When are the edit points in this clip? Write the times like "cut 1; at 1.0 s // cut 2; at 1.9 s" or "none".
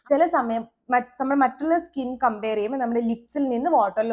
none